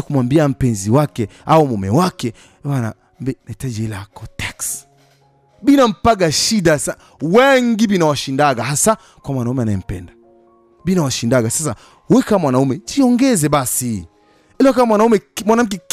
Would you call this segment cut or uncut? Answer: uncut